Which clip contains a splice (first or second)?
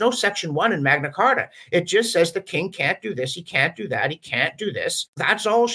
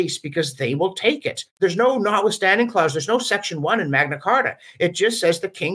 second